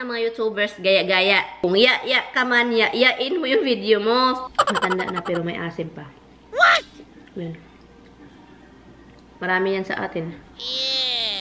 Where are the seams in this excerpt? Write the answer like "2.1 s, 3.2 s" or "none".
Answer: 1.6 s, 4.5 s